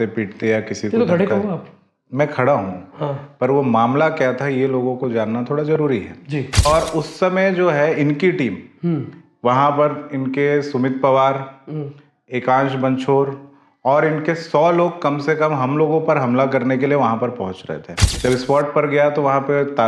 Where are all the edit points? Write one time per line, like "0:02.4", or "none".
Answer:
0:06.6
0:18.1